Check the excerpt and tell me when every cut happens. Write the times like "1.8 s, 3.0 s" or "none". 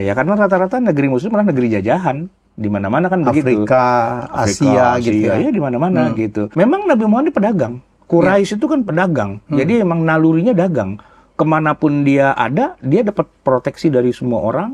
6.4 s

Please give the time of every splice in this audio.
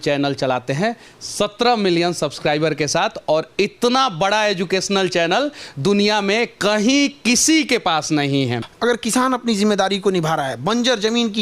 8.7 s

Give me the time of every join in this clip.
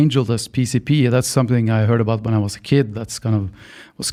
none

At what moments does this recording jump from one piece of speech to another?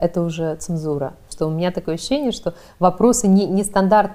1.3 s

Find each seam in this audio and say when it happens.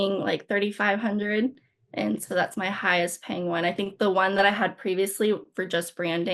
none

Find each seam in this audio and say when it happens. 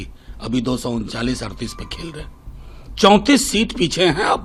none

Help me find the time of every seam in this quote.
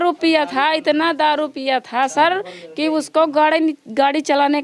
none

